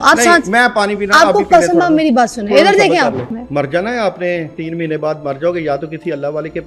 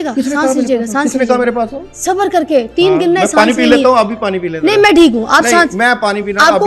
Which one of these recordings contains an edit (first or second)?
first